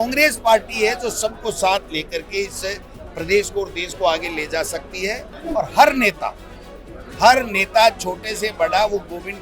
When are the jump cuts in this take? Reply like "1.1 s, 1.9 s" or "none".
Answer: 5.3 s